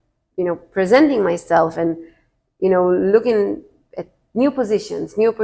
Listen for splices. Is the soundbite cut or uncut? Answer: uncut